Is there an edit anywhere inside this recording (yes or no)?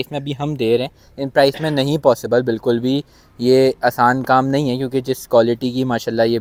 no